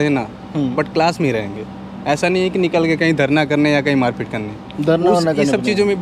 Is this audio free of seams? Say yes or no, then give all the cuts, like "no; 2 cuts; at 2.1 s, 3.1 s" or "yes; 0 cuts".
yes; 0 cuts